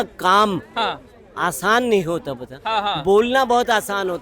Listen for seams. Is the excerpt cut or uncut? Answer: uncut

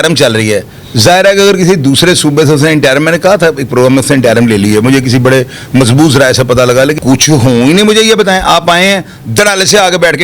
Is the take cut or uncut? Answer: cut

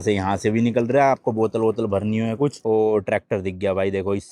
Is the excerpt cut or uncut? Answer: cut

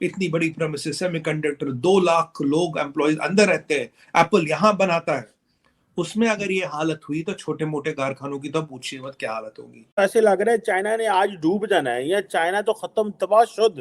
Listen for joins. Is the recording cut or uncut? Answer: cut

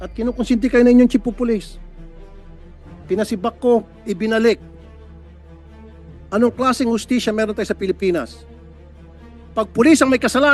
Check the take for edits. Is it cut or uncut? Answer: uncut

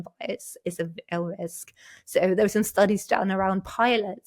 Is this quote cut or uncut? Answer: uncut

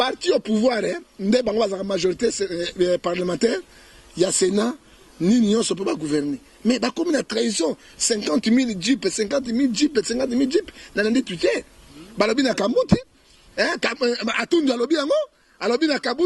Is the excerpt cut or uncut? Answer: uncut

